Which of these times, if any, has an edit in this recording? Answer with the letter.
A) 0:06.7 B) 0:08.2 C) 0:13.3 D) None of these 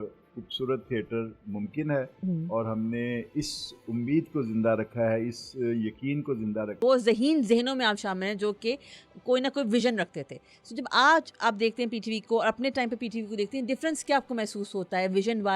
A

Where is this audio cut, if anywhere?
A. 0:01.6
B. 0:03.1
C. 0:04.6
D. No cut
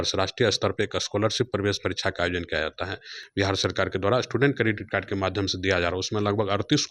B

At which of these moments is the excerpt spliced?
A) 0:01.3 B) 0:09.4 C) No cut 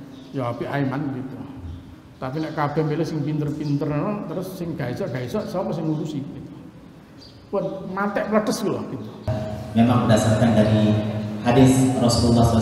B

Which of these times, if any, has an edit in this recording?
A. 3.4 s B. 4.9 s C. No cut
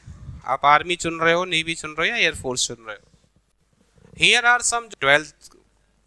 B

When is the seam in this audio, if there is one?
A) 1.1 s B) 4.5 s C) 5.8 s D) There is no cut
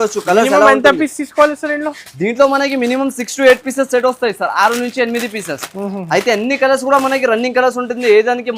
D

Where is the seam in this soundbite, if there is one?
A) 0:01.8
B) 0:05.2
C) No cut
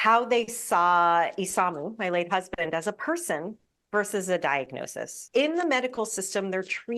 B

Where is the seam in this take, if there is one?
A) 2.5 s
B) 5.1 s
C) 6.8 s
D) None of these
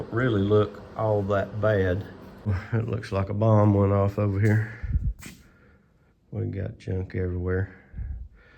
A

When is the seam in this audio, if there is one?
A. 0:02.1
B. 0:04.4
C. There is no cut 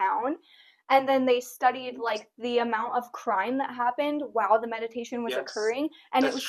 C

